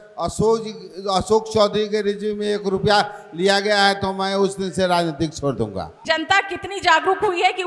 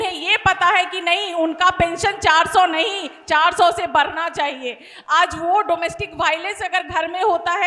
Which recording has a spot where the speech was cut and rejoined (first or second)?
first